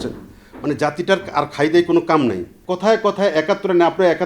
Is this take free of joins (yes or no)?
no